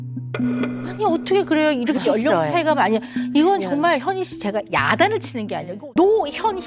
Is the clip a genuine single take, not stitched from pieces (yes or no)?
no